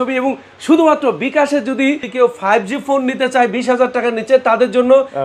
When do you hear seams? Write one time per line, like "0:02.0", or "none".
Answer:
0:02.1